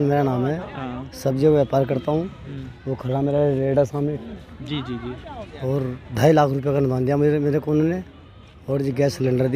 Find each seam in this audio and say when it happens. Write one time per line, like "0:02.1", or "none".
none